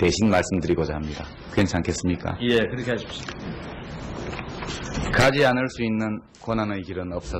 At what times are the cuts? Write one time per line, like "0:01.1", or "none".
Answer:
0:05.3